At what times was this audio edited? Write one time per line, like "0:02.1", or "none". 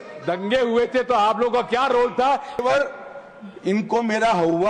0:02.6